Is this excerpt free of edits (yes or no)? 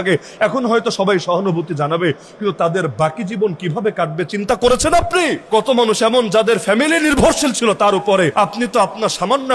no